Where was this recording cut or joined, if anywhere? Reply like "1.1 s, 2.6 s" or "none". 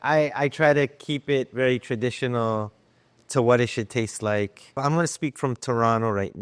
4.8 s